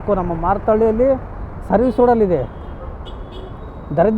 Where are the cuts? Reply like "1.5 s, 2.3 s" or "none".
none